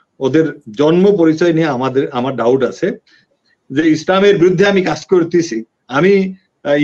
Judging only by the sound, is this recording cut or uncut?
cut